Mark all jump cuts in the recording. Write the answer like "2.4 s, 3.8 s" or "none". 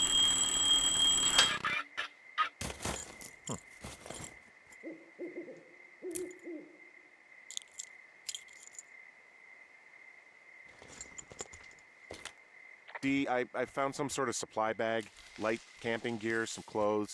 1.1 s